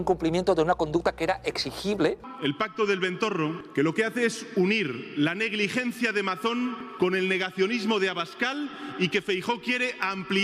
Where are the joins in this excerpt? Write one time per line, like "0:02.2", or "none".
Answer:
0:02.3
0:03.6
0:06.8